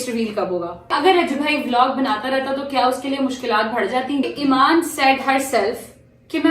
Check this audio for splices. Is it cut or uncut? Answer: cut